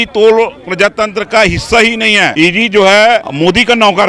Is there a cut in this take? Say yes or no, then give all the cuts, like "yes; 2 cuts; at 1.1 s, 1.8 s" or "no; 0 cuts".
yes; 2 cuts; at 2.3 s, 3.3 s